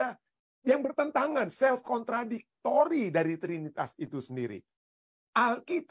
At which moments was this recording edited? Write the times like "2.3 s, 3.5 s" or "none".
4.9 s